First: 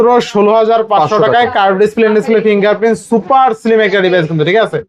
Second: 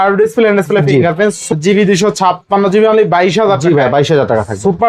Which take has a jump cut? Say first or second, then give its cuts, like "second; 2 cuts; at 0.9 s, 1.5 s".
second; 1 cut; at 1.5 s